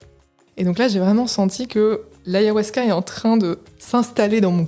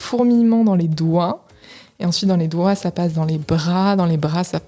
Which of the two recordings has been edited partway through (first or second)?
first